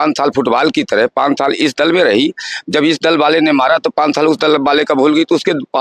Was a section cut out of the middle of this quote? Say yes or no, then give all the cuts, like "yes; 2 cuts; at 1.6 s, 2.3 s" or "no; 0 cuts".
no; 0 cuts